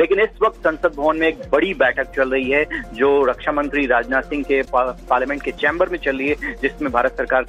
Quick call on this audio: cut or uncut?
uncut